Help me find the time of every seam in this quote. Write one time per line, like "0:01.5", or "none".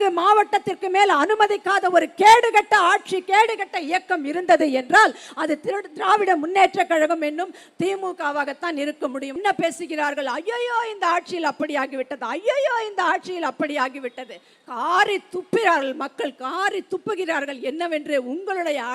0:09.4

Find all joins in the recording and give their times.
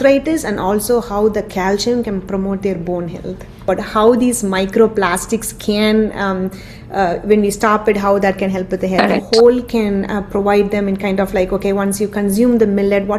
0:03.6
0:09.2

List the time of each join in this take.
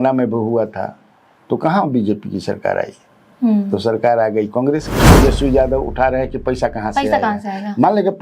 0:05.0

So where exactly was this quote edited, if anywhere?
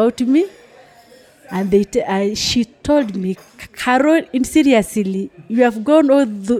none

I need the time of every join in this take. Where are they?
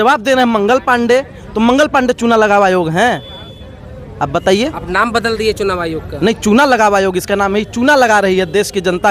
none

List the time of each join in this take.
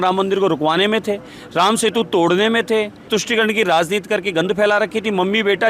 0:03.1

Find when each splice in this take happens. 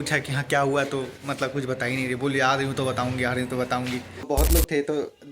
0:04.3

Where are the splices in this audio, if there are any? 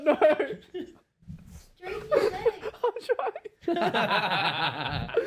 none

